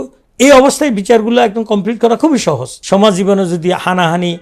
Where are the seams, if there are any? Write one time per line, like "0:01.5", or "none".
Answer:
0:02.7